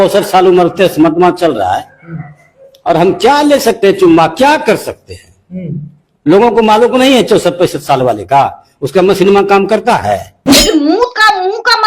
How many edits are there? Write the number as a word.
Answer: zero